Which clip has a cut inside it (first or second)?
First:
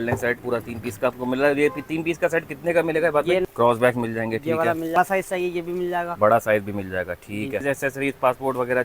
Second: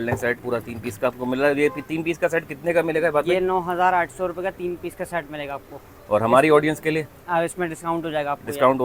first